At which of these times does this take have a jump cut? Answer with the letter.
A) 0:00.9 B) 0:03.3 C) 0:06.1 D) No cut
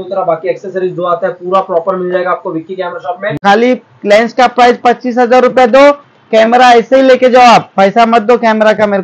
B